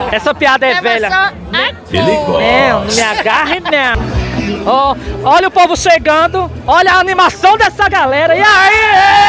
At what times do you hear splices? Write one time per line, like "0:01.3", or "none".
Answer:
0:03.9